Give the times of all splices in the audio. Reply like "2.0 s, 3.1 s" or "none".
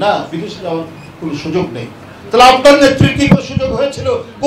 none